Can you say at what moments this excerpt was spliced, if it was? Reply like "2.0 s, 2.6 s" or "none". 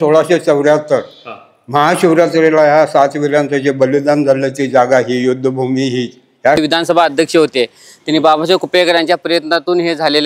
6.6 s